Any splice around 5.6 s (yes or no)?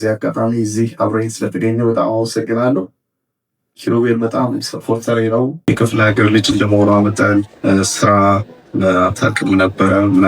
yes